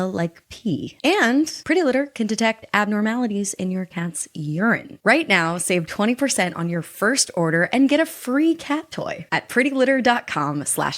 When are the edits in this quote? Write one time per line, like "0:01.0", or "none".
0:00.9
0:01.6
0:04.9